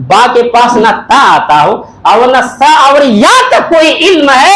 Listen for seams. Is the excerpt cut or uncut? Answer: uncut